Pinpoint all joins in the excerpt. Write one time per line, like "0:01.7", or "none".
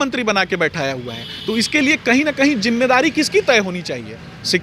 none